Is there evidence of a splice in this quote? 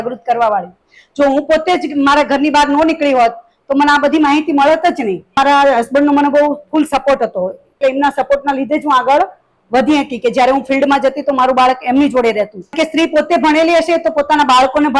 yes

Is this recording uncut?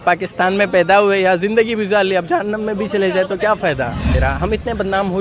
no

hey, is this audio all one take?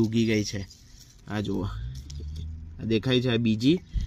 yes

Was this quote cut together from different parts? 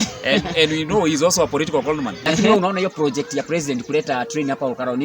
yes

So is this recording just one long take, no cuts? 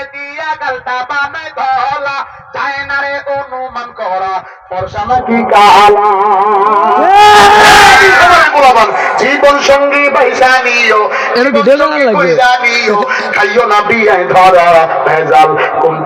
yes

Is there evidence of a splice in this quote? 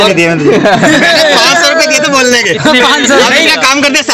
no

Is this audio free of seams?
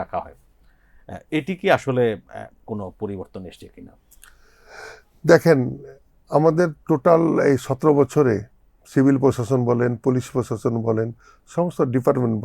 yes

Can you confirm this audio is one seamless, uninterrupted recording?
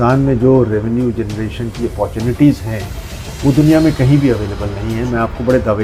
yes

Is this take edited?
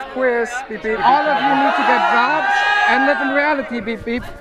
yes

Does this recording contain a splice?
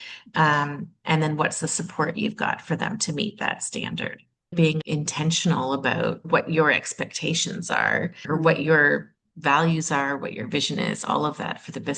yes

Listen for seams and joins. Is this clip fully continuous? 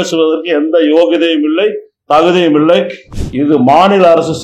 no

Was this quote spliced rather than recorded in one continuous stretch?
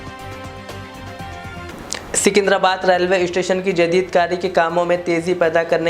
yes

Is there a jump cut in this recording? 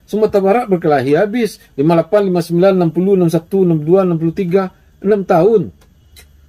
no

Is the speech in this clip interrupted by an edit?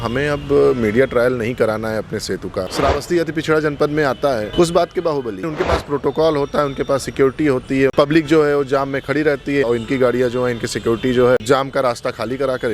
yes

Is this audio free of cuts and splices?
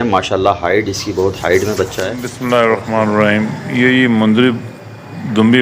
no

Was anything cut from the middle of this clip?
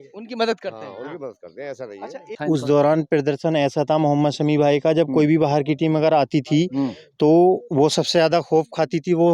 yes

